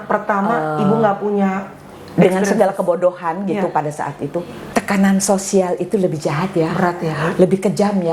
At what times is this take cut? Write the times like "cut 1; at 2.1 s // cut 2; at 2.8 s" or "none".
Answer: cut 1; at 4.6 s